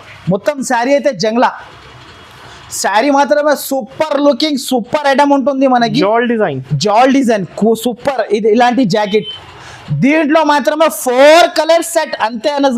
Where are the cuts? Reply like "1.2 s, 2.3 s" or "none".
none